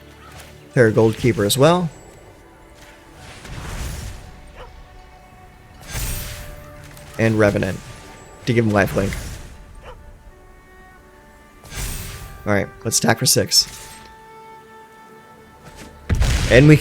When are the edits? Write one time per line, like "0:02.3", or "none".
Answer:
0:05.2